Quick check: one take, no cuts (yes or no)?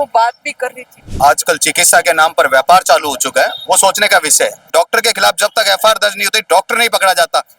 no